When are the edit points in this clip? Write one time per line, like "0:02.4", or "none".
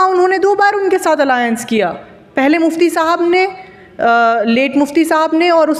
none

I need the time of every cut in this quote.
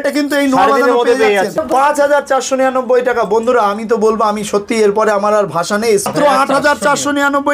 0:01.6
0:06.1

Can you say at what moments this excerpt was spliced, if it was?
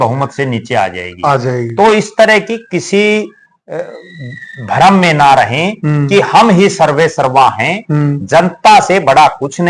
none

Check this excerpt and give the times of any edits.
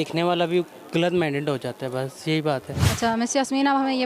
none

